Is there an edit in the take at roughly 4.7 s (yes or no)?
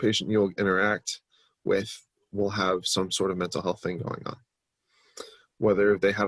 no